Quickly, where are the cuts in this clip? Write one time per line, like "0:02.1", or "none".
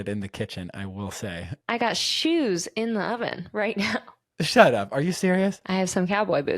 0:01.7
0:04.2